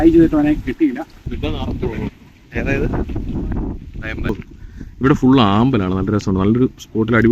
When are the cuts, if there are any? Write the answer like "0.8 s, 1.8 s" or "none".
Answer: 1.1 s, 4.3 s